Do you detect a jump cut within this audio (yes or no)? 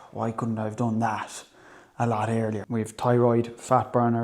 yes